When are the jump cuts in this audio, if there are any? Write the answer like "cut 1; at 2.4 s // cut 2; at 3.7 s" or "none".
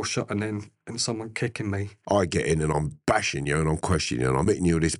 cut 1; at 1.9 s